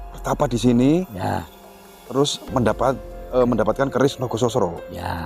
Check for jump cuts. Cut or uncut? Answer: uncut